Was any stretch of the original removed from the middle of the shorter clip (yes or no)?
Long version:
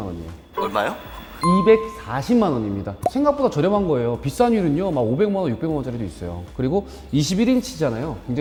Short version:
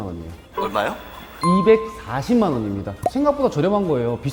no